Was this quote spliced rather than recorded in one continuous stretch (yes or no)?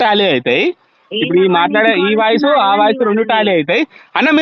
no